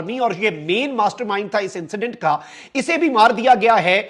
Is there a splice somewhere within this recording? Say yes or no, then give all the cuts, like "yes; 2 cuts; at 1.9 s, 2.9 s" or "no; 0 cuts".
no; 0 cuts